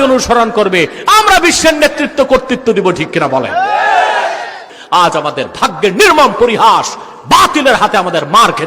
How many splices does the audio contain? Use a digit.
1